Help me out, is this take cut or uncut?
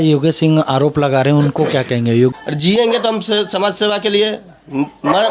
cut